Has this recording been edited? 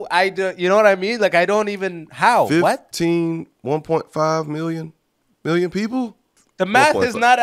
yes; 1 cut; at 6.4 s

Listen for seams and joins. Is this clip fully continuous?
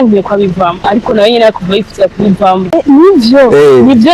no; 1 cut; at 2.7 s

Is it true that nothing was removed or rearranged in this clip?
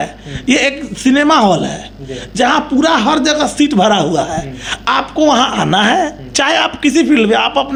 yes; 0 cuts

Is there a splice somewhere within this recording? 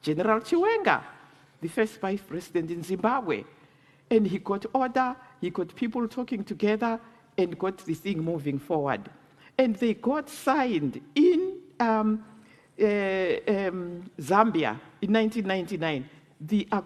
no; 0 cuts

